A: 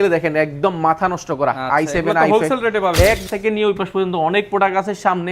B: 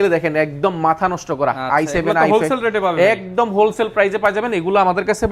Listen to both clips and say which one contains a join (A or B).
A